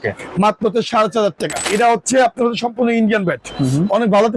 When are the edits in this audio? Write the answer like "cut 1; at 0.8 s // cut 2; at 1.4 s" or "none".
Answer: cut 1; at 1.7 s